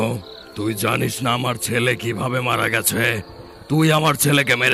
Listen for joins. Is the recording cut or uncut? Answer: uncut